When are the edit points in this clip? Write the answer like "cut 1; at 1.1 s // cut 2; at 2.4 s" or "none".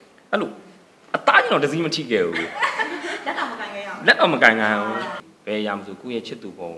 cut 1; at 5.1 s